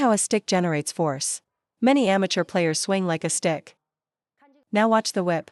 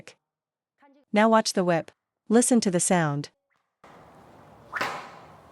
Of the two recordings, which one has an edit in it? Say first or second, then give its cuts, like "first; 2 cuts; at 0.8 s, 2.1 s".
second; 1 cut; at 3.8 s